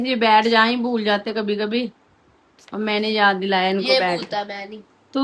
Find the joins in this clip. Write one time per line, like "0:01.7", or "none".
none